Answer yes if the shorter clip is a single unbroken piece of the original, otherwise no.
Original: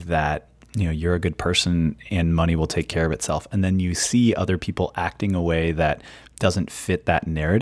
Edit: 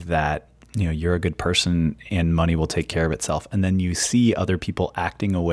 yes